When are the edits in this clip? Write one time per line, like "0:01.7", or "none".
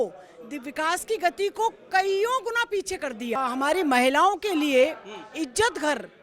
0:03.4